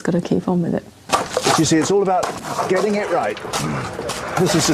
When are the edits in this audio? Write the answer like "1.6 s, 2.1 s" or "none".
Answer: 0.9 s